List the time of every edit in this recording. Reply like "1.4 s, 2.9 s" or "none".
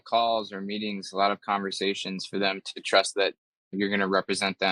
3.7 s